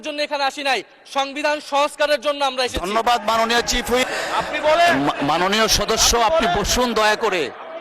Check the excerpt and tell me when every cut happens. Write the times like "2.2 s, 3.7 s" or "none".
4.0 s